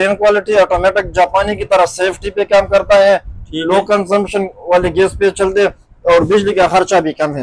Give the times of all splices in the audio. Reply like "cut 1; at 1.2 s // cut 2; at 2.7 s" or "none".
none